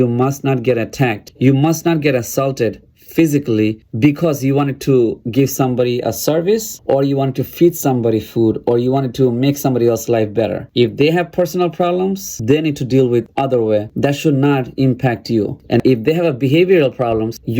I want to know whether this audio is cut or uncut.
uncut